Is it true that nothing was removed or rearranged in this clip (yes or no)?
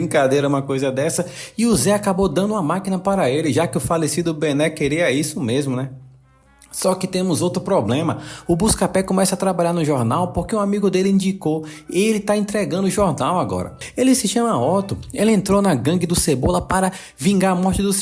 no